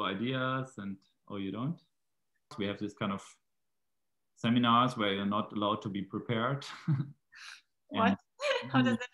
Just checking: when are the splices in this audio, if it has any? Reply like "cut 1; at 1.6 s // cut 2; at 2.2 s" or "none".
cut 1; at 2.5 s